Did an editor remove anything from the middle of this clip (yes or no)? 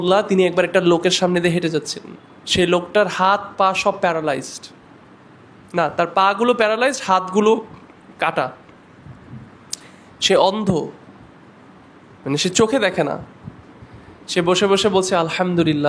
no